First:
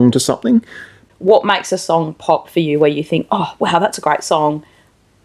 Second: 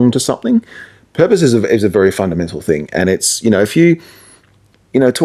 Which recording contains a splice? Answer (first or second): first